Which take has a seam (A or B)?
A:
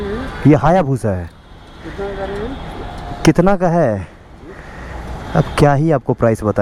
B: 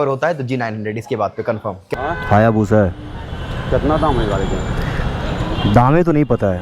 B